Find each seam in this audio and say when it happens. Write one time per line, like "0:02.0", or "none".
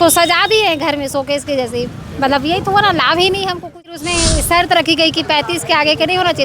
0:03.9